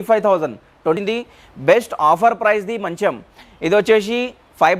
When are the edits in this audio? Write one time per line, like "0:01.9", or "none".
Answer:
0:01.0